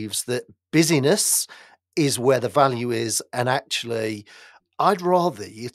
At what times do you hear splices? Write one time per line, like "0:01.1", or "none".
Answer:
0:04.5